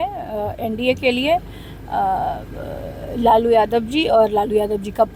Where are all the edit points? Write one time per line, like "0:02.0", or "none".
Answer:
none

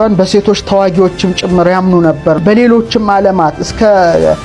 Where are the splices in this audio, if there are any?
0:02.4

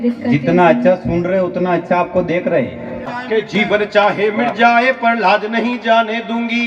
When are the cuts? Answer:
0:03.2

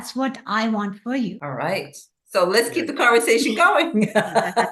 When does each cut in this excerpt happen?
0:01.4

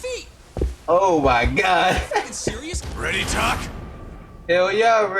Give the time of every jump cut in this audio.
0:02.8

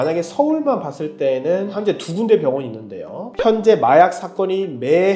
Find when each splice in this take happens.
0:03.3

